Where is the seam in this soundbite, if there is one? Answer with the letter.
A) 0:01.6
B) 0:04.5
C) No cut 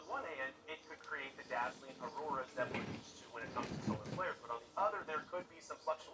C